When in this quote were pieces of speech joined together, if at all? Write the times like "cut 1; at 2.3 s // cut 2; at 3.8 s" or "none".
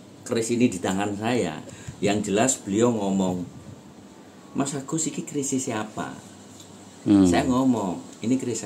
cut 1; at 1.7 s